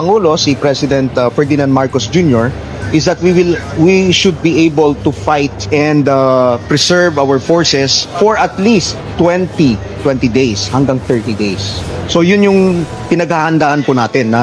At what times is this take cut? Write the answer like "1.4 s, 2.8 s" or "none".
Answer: none